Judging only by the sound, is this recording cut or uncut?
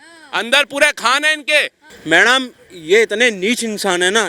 cut